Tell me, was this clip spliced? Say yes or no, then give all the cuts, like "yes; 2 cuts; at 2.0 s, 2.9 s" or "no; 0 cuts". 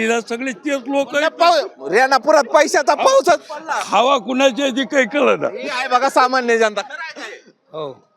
no; 0 cuts